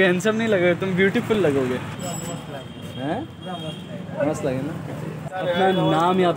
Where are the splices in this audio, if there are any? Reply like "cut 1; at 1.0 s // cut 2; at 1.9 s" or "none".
cut 1; at 2.0 s // cut 2; at 5.3 s